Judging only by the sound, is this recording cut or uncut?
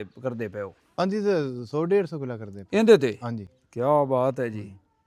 uncut